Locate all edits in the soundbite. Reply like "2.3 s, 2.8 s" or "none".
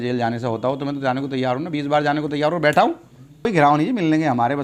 3.5 s